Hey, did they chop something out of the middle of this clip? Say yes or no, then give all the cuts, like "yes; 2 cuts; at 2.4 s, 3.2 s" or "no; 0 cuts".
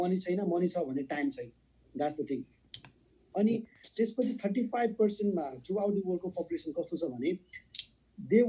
no; 0 cuts